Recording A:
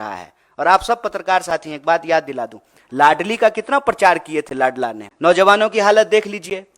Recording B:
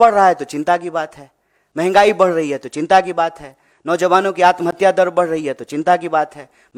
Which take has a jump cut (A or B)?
A